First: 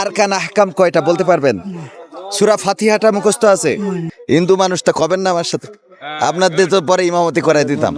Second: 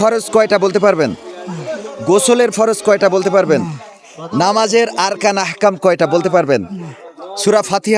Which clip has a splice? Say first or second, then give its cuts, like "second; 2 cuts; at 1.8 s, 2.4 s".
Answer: first; 1 cut; at 4.1 s